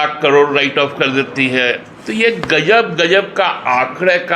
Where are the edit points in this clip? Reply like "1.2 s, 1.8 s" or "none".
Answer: 1.9 s